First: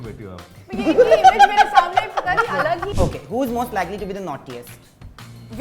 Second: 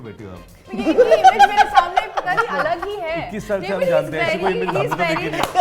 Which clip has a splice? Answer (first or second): first